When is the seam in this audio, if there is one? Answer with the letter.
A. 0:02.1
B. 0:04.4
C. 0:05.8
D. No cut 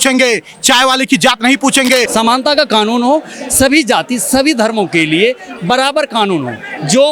A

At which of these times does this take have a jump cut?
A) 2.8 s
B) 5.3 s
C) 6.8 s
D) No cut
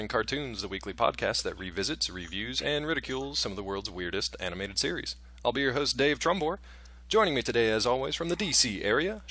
D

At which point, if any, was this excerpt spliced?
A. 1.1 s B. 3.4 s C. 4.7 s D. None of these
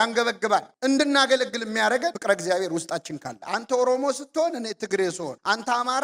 B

